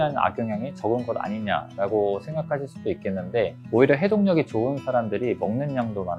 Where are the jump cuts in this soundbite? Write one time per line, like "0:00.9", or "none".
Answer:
0:03.6

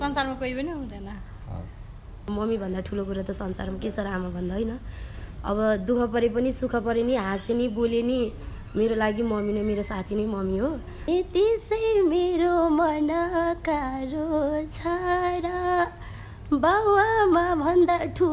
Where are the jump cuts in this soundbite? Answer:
0:02.2
0:11.1

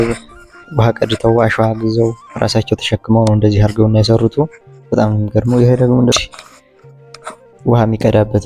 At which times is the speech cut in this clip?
0:06.1

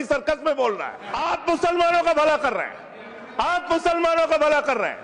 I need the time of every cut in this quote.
0:01.0

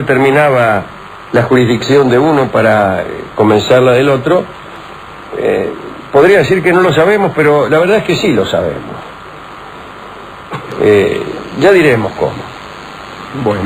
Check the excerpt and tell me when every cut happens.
0:08.9

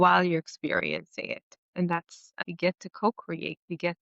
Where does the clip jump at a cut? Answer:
0:02.2

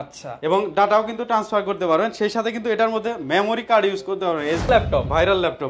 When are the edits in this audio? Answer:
0:04.7

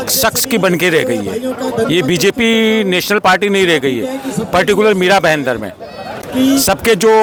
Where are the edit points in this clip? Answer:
none

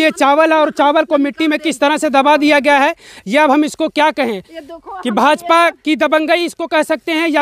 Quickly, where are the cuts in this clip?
none

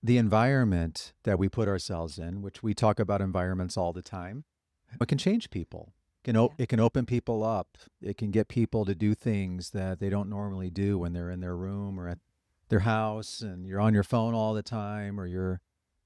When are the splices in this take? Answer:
none

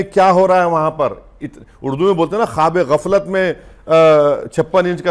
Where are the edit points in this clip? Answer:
none

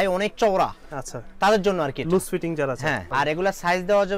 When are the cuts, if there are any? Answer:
0:03.0

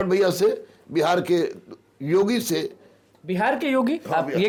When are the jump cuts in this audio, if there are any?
none

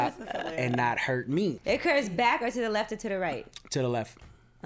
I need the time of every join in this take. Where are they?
0:01.6

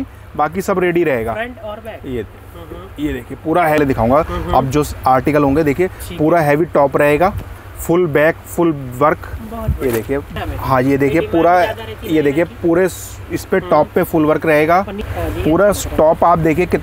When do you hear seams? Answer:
0:03.8
0:10.3
0:15.1

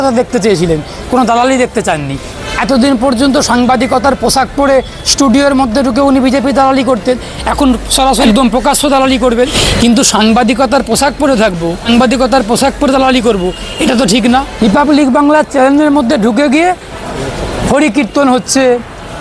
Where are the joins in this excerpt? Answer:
0:08.2
0:09.6
0:11.8
0:14.5

